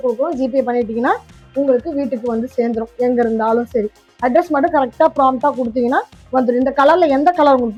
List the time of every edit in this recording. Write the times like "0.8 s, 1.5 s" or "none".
none

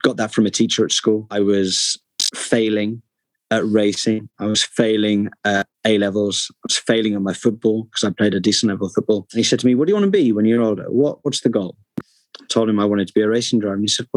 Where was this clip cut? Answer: 1.3 s, 9.3 s

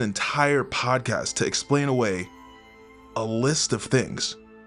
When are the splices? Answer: none

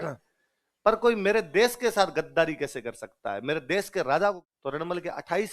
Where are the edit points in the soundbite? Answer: 4.4 s

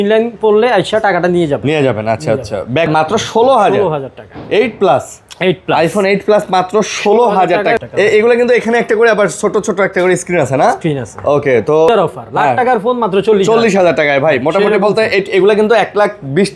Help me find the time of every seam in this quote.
2.9 s, 7.8 s, 11.9 s

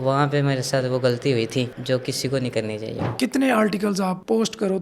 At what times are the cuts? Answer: 3.0 s

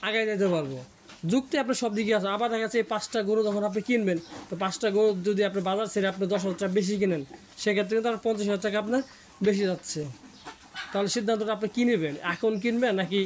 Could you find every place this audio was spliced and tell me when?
none

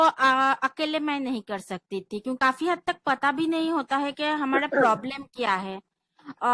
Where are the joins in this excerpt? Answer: 2.4 s

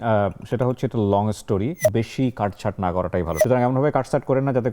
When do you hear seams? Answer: 1.8 s

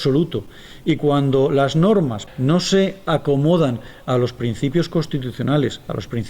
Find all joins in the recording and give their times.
2.2 s

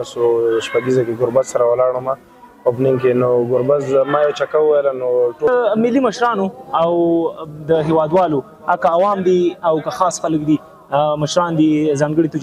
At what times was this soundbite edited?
5.5 s

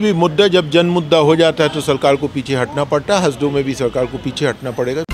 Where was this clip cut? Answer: none

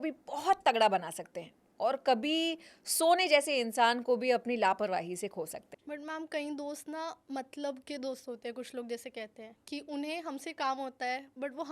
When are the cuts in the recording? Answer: 5.8 s

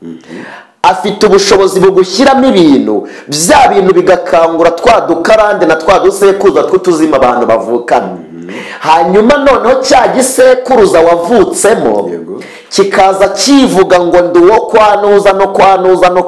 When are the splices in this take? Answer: none

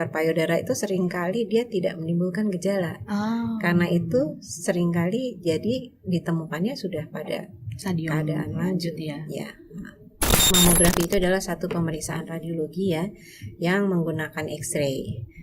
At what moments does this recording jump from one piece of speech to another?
10.5 s

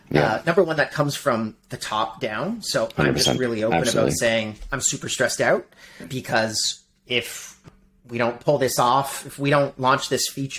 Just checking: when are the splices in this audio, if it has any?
6.0 s, 7.6 s

